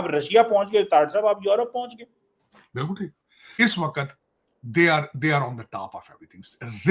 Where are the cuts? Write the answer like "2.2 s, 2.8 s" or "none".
3.4 s